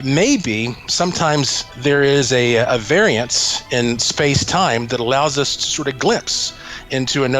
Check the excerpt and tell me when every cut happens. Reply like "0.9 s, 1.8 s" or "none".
1.2 s